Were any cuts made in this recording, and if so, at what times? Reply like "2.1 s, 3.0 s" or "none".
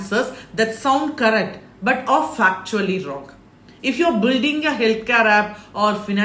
none